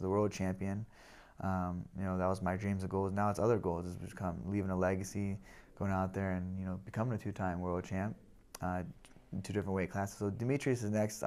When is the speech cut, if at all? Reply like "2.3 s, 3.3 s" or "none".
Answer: none